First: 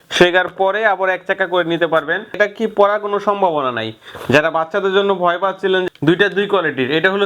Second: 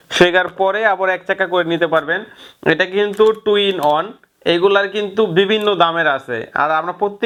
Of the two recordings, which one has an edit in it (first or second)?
first